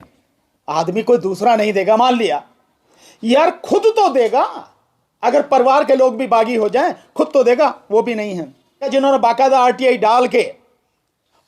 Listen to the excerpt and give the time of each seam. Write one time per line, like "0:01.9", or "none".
0:08.8